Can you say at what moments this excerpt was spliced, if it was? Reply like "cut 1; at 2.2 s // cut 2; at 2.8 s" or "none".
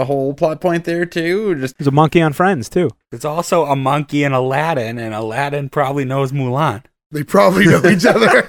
cut 1; at 1.7 s // cut 2; at 3.0 s